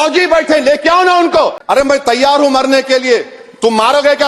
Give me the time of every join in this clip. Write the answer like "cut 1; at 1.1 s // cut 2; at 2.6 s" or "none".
cut 1; at 1.6 s